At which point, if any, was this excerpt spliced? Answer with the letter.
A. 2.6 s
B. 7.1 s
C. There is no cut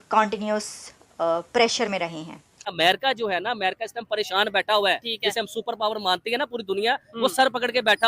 A